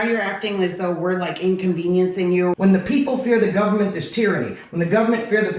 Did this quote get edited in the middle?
yes; 1 cut; at 2.5 s

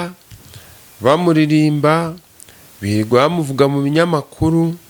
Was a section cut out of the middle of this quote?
no; 0 cuts

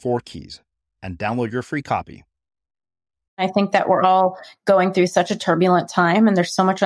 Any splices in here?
yes; 1 cut; at 3.4 s

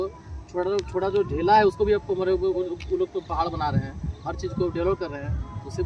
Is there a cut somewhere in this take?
no; 0 cuts

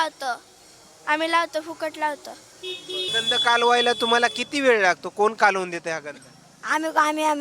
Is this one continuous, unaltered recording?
no; 1 cut; at 3.1 s

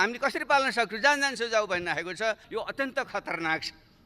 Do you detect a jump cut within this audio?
yes; 1 cut; at 2.4 s

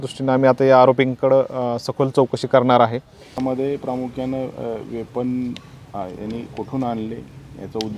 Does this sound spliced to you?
yes; 1 cut; at 3.4 s

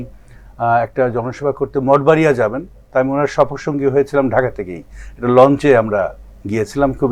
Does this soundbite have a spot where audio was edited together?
no; 0 cuts

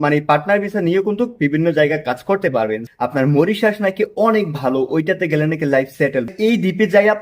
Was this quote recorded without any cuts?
no; 2 cuts; at 2.8 s, 6.3 s

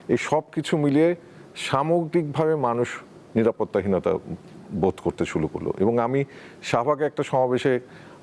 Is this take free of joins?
yes; 0 cuts

